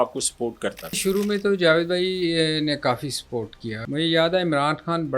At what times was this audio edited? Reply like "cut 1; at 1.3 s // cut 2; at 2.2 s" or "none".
cut 1; at 1.0 s // cut 2; at 3.8 s